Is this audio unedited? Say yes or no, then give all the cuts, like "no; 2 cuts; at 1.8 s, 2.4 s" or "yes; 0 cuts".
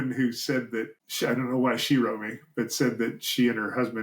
no; 1 cut; at 1.0 s